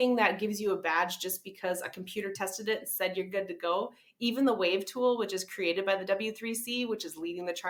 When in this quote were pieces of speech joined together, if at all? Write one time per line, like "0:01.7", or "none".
none